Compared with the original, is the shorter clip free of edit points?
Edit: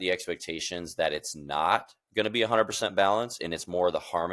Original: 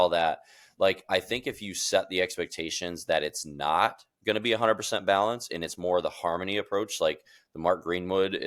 yes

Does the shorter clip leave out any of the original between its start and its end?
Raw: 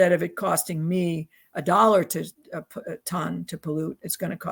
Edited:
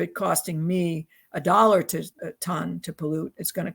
yes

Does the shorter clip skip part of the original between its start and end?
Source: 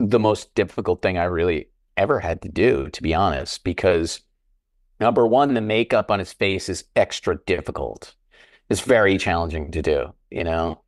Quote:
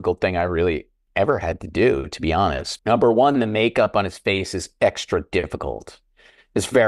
yes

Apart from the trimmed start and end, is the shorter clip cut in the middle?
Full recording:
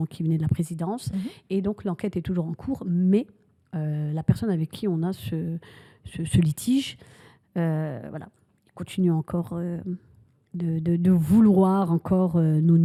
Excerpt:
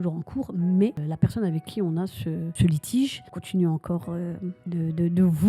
yes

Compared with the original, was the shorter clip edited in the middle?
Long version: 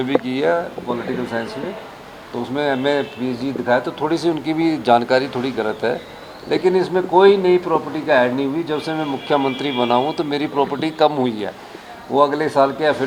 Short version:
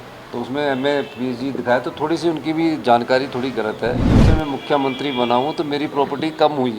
yes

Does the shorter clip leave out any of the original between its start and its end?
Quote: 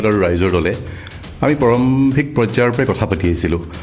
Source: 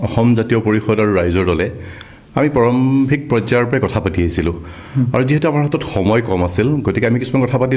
no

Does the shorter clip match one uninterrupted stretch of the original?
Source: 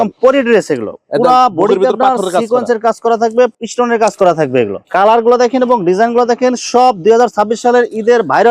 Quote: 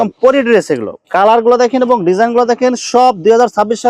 no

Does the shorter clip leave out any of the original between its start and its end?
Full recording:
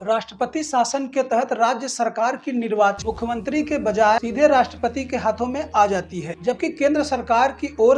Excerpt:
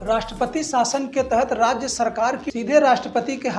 yes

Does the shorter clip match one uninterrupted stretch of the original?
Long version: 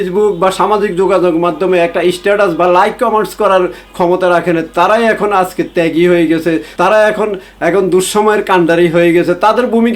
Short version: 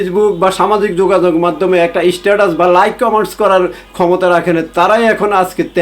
yes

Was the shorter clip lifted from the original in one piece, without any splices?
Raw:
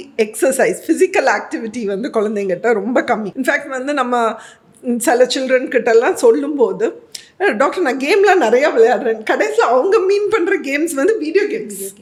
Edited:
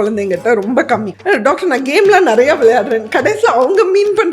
no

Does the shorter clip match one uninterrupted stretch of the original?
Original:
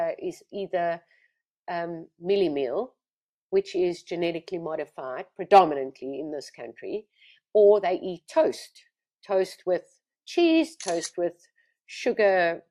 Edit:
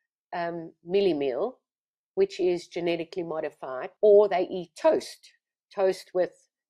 no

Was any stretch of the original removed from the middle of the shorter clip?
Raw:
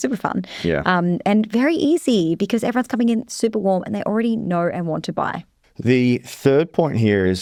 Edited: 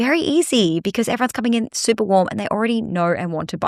no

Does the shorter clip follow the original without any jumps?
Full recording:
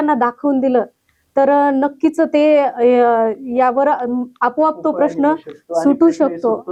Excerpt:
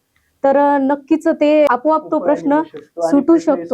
no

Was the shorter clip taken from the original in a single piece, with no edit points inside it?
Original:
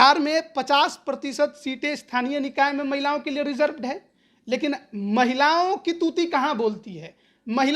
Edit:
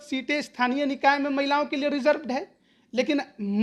yes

